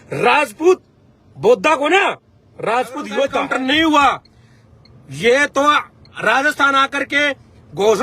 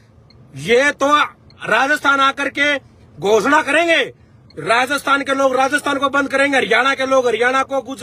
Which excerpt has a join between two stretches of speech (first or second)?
first